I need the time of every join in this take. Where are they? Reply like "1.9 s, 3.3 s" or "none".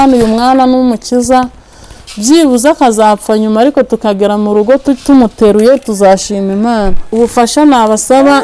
7.0 s